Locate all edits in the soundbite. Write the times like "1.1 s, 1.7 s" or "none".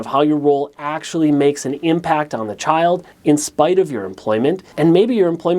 3.1 s, 4.7 s

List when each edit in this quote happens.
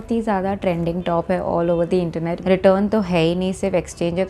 2.2 s

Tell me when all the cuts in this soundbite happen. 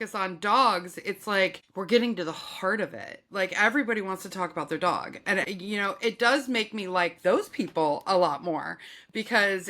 1.7 s, 5.5 s

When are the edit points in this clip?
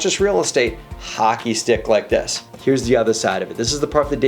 2.4 s

